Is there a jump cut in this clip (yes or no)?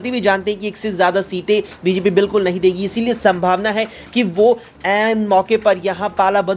no